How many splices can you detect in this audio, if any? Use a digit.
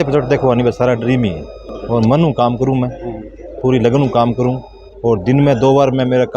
0